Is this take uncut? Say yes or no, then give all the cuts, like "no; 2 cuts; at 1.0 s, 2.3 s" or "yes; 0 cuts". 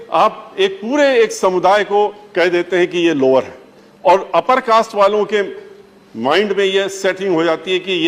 yes; 0 cuts